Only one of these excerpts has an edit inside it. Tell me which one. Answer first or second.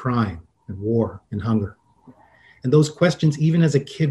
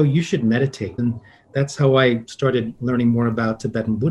second